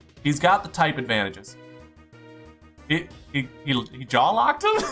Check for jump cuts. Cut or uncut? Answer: uncut